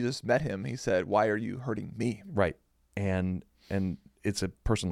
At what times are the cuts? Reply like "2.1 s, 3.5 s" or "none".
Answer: 2.8 s